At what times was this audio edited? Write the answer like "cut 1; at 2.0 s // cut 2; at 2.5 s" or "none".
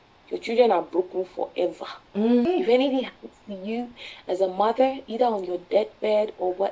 cut 1; at 2.5 s